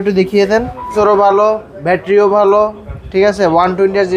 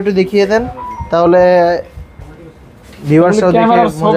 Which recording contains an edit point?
first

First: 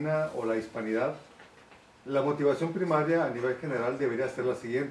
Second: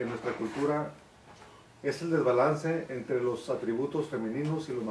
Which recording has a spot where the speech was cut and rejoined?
first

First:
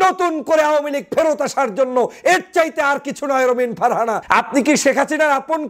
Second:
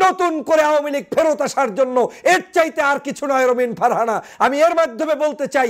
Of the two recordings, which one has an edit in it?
first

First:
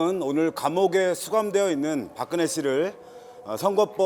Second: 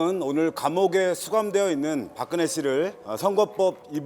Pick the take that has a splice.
second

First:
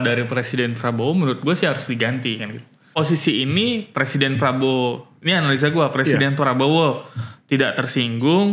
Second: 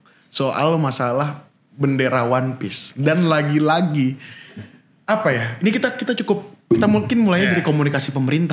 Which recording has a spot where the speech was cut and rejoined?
first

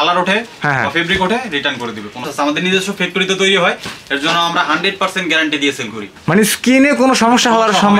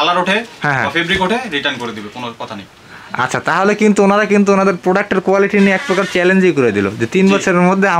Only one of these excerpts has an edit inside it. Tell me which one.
first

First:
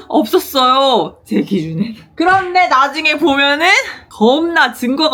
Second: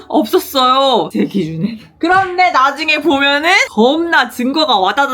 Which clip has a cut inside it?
second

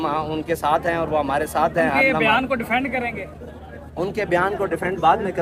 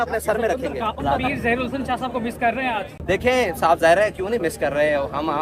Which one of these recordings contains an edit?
second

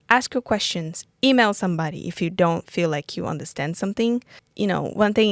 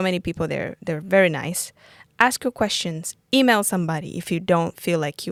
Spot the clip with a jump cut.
first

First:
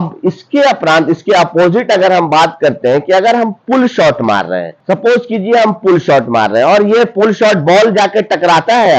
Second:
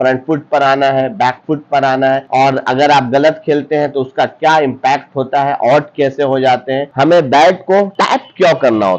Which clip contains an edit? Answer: second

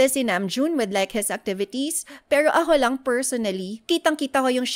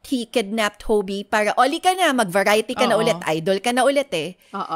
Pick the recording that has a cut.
first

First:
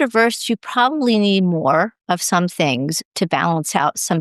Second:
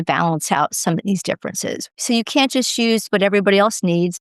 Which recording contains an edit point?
second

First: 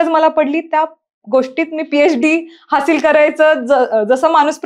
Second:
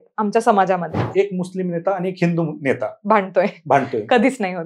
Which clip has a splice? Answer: second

